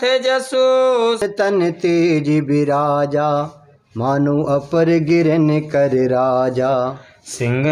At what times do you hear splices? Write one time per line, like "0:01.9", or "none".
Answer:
0:01.2

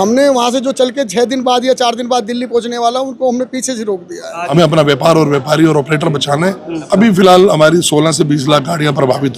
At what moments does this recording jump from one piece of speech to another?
0:04.5
0:06.8

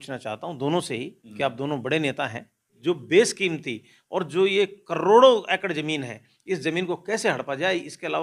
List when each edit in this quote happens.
0:02.7

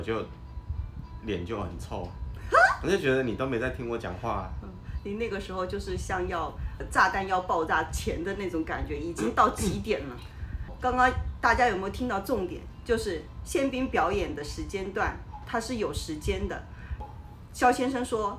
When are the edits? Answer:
none

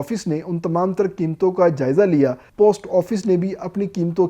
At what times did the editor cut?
0:02.4

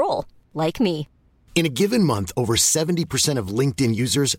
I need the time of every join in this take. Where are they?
none

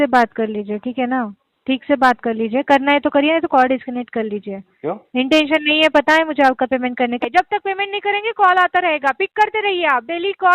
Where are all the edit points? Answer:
0:07.2

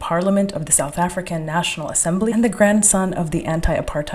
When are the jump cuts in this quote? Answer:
0:02.3

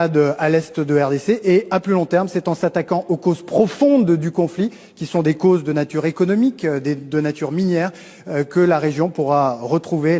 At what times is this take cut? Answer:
none

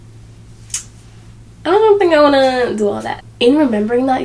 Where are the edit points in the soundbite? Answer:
0:03.1

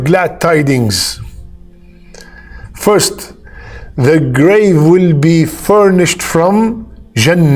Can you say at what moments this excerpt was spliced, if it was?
none

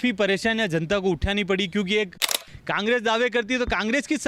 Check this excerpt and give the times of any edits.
0:02.4

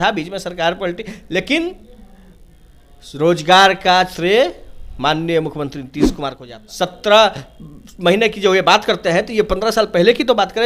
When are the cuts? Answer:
0:06.1

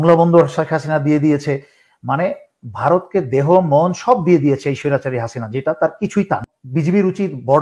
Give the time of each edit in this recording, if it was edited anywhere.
0:06.6

